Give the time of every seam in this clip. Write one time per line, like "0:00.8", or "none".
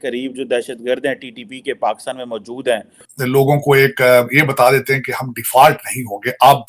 0:03.1